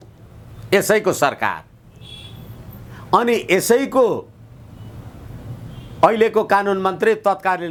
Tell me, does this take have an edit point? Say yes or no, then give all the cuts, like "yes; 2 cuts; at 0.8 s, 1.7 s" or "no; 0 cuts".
no; 0 cuts